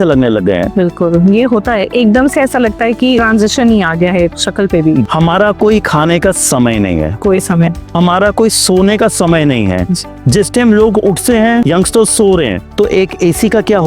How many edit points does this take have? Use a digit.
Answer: 4